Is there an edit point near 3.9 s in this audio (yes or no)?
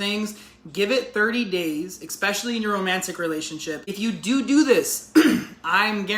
yes